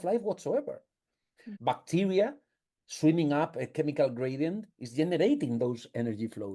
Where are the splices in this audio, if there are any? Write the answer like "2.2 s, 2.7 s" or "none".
1.4 s